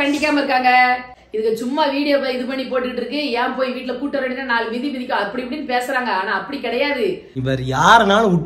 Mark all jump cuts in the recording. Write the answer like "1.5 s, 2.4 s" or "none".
1.1 s, 7.3 s